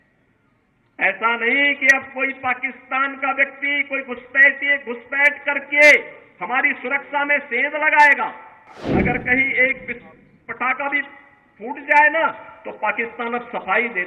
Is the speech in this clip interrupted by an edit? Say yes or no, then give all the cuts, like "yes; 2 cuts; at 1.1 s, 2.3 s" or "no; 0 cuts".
yes; 1 cut; at 8.7 s